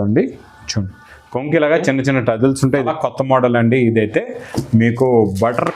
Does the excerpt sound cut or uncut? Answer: cut